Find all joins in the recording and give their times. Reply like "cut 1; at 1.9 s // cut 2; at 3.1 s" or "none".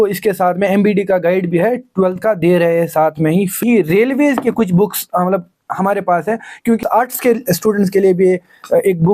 cut 1; at 3.6 s // cut 2; at 6.8 s

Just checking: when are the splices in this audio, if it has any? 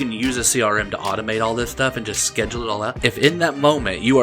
cut 1; at 2.9 s

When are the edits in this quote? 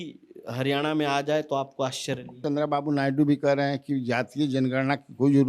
cut 1; at 2.3 s

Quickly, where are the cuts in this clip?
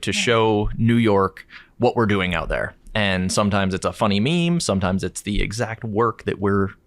none

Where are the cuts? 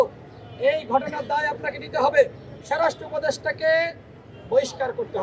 cut 1; at 2.6 s

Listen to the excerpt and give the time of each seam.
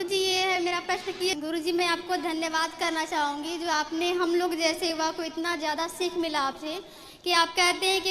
cut 1; at 1.4 s

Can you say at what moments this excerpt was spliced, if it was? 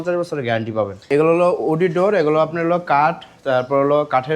cut 1; at 1.1 s

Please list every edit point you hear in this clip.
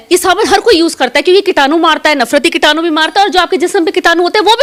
none

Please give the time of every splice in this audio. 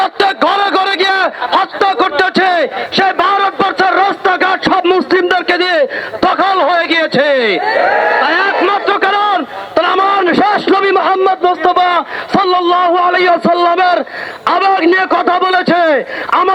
none

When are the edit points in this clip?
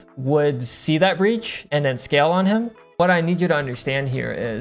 cut 1; at 1.5 s // cut 2; at 3.0 s

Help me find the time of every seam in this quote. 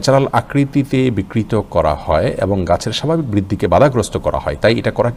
none

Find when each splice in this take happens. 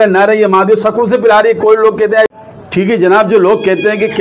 cut 1; at 2.3 s

